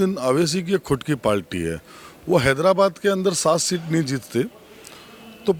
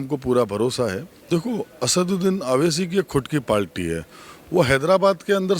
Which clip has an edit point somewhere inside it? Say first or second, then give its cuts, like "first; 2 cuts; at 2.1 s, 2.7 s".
second; 1 cut; at 1.1 s